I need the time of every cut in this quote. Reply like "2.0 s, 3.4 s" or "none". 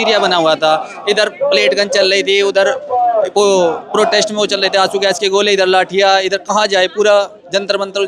none